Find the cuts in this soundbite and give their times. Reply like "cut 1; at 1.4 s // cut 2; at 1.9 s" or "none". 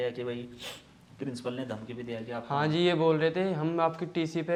none